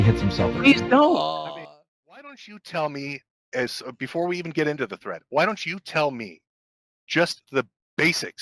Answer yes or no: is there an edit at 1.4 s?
yes